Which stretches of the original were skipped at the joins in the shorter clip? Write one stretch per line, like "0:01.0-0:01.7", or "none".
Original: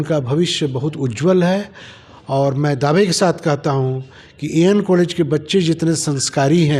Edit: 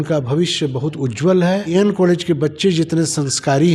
0:01.7-0:04.6